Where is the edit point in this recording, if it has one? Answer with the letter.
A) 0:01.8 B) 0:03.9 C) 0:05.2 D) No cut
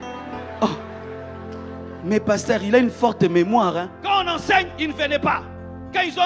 B